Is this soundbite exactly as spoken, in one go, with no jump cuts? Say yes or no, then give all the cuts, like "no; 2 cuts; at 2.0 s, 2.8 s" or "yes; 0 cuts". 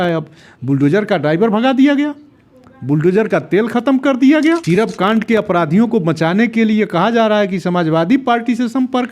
no; 1 cut; at 4.6 s